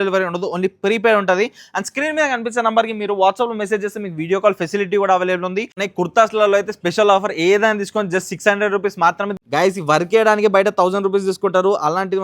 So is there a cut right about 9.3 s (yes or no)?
yes